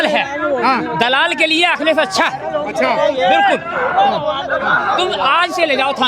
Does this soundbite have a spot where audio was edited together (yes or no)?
no